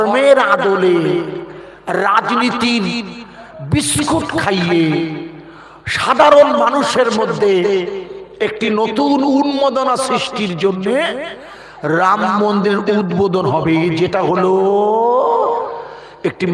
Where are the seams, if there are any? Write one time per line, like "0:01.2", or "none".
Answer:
none